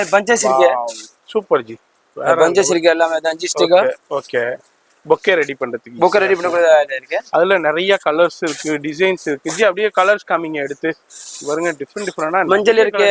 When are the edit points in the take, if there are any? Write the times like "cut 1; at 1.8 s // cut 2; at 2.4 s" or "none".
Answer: none